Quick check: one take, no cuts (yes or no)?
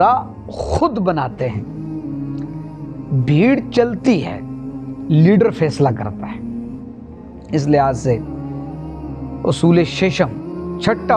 no